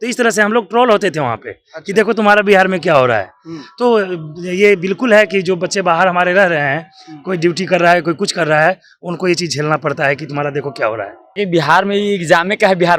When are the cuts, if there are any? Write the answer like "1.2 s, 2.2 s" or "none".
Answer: 11.4 s